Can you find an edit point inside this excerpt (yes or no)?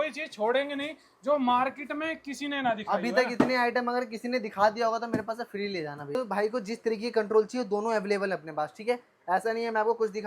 yes